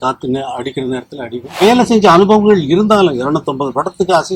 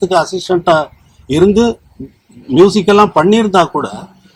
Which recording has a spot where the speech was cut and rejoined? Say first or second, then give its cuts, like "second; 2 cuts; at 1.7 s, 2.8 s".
first; 1 cut; at 1.6 s